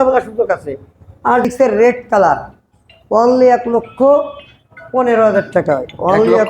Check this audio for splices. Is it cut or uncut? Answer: cut